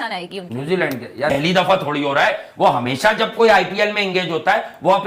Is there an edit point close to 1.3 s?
yes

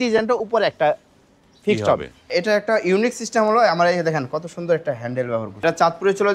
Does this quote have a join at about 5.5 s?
yes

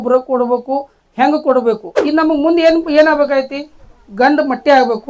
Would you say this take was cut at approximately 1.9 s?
yes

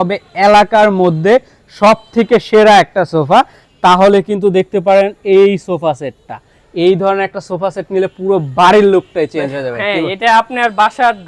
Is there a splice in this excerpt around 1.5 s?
no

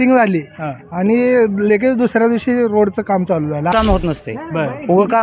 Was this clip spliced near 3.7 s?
yes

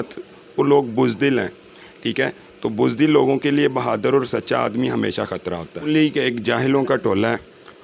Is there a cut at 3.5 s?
no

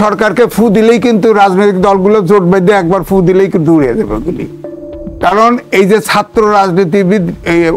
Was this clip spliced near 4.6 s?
no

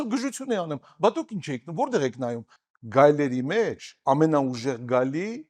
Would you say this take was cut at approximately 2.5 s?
yes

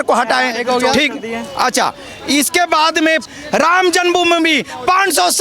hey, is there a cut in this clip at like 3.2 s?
yes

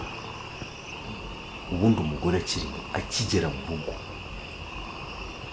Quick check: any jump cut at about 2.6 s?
no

